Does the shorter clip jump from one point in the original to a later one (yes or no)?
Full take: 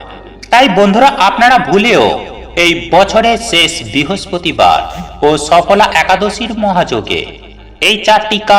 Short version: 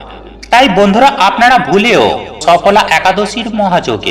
yes